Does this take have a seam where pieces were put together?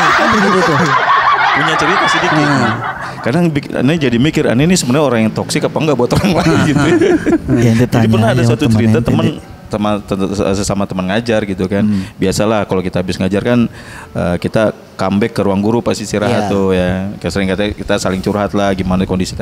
no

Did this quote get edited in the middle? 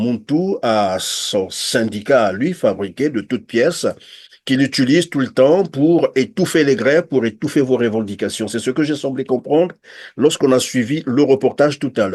no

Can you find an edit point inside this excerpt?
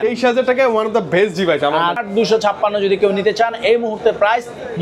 yes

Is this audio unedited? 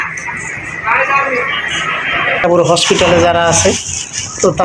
no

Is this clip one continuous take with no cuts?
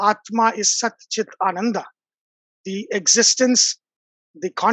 yes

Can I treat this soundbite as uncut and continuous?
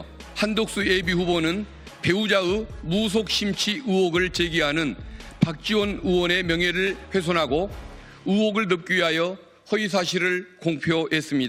yes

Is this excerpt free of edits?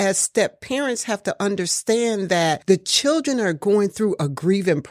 yes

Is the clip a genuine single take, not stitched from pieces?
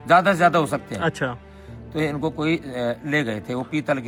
yes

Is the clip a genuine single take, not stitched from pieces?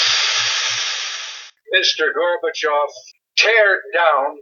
no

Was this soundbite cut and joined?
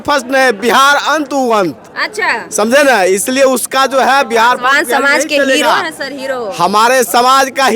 no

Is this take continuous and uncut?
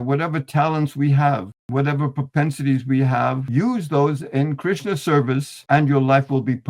no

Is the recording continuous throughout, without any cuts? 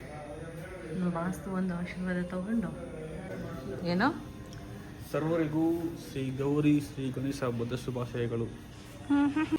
yes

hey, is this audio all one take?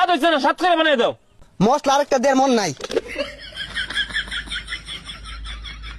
no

